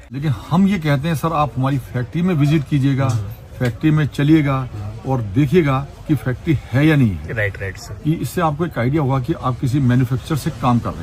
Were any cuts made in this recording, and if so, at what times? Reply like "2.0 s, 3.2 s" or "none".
none